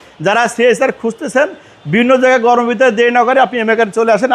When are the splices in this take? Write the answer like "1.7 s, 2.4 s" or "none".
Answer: none